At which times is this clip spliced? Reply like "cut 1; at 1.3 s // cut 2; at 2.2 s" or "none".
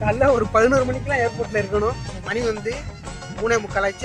none